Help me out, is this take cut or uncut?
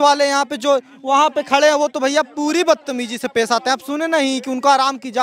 uncut